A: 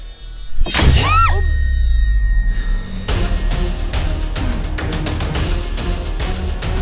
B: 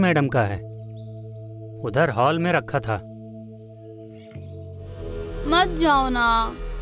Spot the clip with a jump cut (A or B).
B